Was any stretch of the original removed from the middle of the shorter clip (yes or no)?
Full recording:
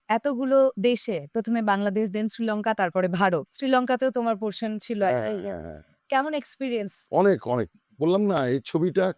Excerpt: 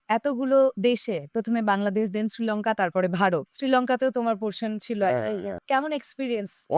yes